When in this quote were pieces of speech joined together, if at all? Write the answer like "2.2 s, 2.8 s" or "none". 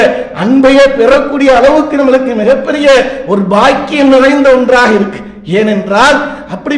none